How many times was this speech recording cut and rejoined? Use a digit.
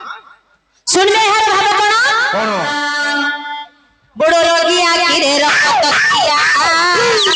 1